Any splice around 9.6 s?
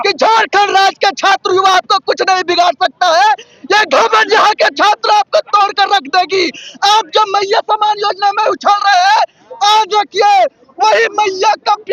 no; 0 cuts

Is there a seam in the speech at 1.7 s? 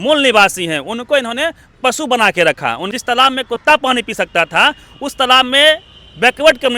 no; 1 cut; at 2.9 s

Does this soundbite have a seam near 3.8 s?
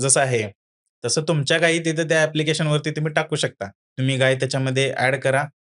yes; 1 cut; at 3.8 s

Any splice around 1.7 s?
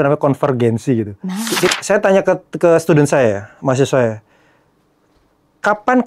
yes; 1 cut; at 1.7 s

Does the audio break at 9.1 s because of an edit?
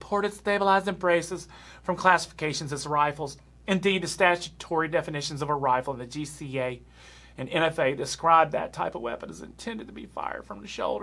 no; 0 cuts

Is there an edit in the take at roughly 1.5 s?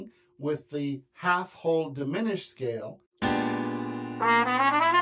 no; 1 cut; at 3.0 s

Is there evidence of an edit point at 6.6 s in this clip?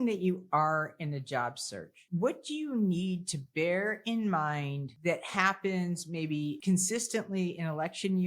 yes; 3 cuts; at 2.0 s, 4.9 s, 6.6 s

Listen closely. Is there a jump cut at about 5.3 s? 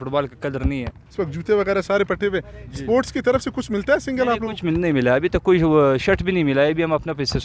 no; 1 cut; at 1.1 s

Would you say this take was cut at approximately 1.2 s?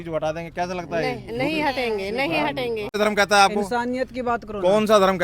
no; 1 cut; at 2.9 s

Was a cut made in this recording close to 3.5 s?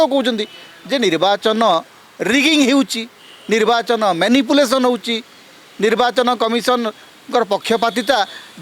no; 0 cuts

